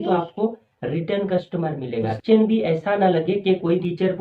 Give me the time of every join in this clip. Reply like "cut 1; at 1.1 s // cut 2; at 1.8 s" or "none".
cut 1; at 2.2 s